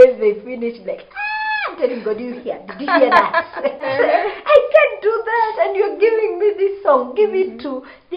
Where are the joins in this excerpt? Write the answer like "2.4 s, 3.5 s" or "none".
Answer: 3.8 s